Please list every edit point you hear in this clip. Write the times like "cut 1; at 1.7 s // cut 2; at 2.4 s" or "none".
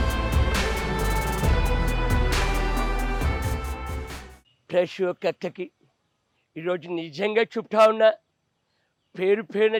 none